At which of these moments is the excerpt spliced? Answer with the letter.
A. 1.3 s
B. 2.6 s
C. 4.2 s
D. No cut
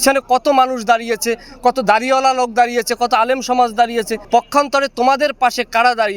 C